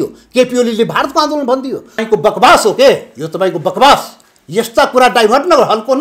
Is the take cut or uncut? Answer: cut